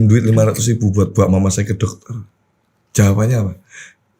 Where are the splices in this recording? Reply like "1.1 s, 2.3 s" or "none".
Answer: none